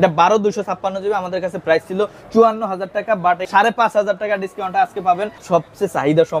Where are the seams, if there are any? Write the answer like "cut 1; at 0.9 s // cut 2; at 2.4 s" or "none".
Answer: cut 1; at 3.5 s // cut 2; at 5.3 s